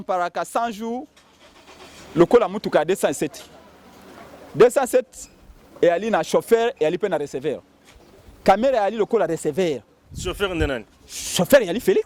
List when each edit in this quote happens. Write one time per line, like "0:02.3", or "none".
none